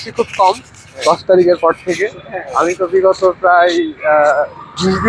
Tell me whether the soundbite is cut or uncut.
uncut